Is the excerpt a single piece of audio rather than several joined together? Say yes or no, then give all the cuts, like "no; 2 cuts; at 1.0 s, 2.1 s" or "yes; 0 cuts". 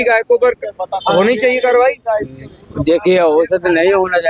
yes; 0 cuts